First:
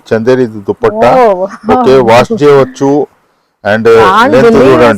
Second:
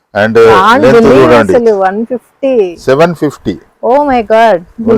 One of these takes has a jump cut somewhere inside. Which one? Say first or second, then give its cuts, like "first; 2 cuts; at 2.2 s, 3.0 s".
second; 1 cut; at 2.8 s